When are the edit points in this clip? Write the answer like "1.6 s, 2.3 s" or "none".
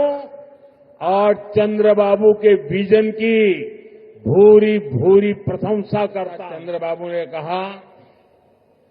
6.5 s